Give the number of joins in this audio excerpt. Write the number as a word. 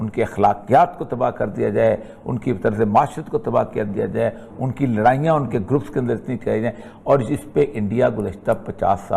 zero